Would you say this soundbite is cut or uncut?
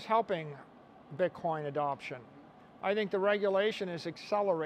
uncut